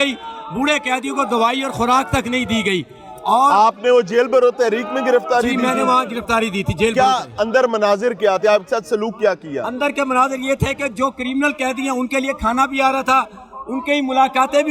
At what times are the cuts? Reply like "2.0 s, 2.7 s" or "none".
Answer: none